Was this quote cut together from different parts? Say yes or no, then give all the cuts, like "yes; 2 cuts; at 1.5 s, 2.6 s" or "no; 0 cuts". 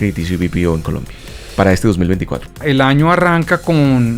yes; 1 cut; at 2.6 s